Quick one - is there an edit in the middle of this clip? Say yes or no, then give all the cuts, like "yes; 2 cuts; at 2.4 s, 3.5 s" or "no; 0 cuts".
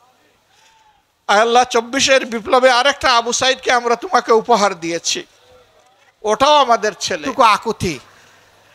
yes; 1 cut; at 7.3 s